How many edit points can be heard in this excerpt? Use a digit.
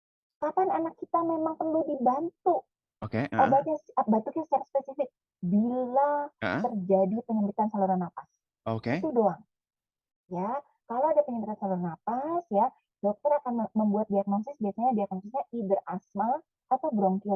0